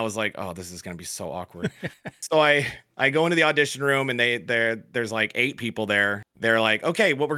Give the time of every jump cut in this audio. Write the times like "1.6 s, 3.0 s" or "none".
6.3 s

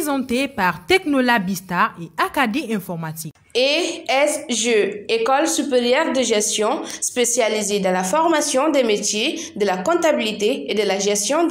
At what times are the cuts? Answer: none

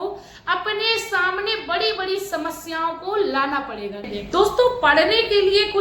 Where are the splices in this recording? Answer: 4.1 s

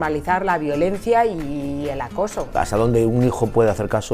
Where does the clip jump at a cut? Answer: 2.5 s

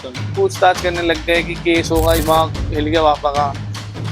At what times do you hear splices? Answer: 2.2 s

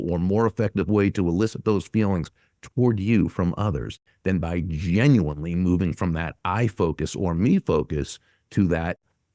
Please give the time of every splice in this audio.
none

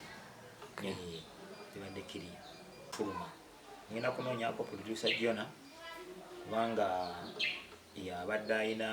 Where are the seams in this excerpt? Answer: 2.9 s

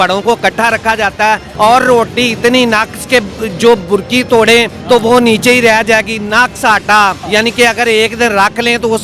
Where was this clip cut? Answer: 1.5 s, 4.7 s, 7.2 s

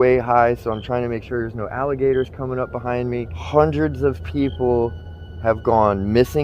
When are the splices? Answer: 3.3 s

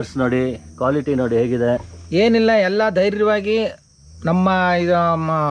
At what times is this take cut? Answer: 1.9 s

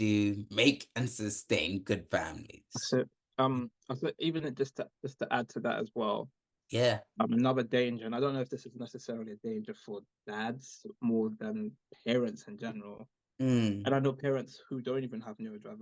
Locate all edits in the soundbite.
none

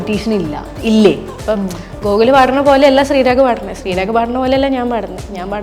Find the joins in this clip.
1.4 s

